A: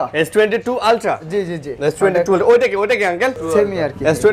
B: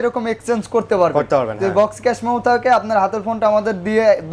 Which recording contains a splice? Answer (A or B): A